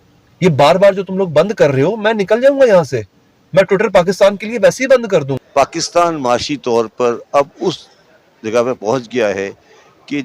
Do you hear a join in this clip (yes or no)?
yes